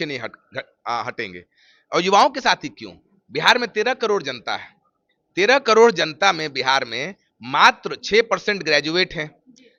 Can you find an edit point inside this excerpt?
no; 0 cuts

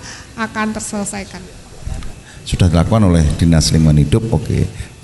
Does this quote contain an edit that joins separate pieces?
yes; 1 cut; at 1.9 s

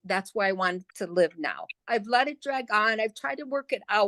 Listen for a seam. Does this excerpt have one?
yes; 1 cut; at 1.8 s

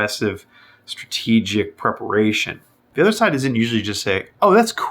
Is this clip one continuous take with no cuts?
no; 1 cut; at 2.8 s

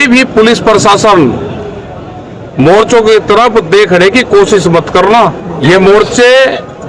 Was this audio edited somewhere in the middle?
yes; 1 cut; at 5.5 s

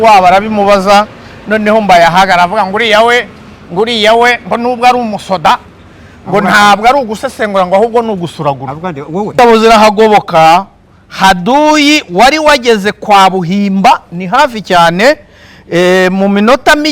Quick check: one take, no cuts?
no; 1 cut; at 9.4 s

